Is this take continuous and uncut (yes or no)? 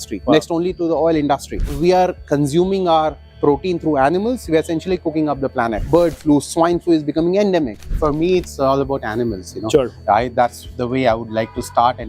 no